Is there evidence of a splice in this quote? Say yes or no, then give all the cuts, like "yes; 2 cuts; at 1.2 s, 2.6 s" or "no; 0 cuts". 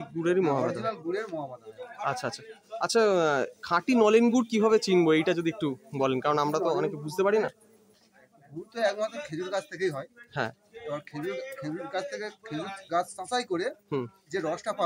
no; 0 cuts